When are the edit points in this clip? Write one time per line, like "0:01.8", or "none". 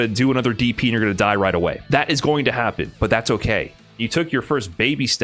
0:03.8